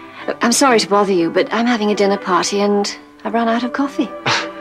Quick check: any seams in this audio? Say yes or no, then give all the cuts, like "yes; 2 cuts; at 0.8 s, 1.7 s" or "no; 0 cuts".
no; 0 cuts